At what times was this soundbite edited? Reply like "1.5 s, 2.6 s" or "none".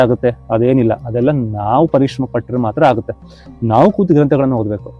none